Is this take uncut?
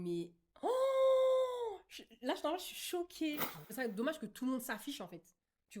no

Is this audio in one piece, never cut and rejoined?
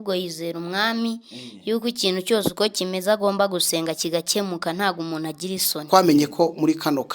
no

